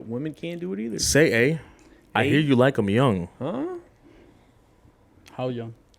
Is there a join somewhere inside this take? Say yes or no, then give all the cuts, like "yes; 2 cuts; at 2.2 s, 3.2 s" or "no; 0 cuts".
no; 0 cuts